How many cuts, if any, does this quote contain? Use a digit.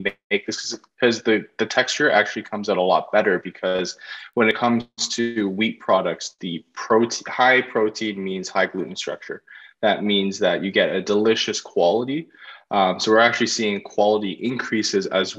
1